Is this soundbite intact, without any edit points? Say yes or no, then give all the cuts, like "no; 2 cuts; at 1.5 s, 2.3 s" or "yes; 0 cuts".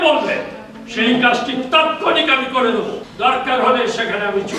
no; 1 cut; at 3.1 s